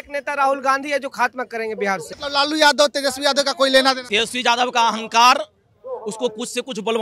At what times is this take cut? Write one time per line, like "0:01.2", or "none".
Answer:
0:02.1
0:04.0